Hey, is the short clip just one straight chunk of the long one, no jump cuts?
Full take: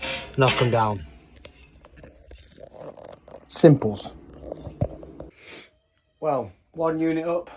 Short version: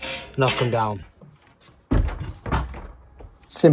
yes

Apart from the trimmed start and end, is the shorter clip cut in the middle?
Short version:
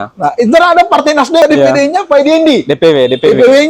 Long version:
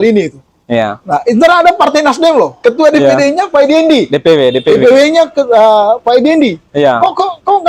yes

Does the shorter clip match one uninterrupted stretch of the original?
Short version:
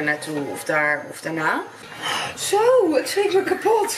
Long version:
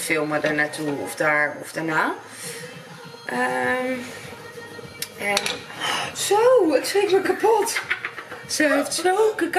no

